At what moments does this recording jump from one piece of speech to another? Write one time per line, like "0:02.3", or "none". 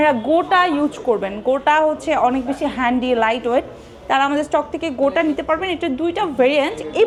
none